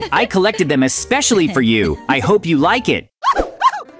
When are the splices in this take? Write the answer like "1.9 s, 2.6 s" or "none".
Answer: 3.1 s